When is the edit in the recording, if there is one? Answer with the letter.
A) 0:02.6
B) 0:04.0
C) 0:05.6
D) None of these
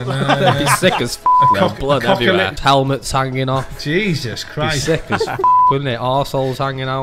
A